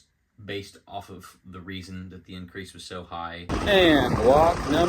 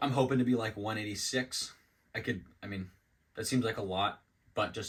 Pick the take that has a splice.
first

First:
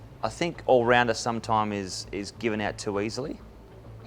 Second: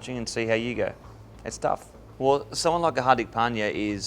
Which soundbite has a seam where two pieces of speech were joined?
second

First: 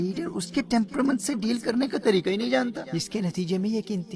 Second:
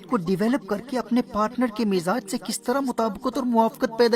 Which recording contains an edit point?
first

